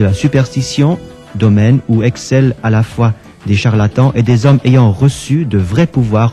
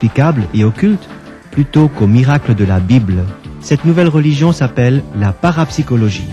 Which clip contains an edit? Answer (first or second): second